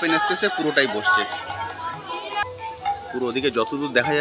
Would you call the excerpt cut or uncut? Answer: cut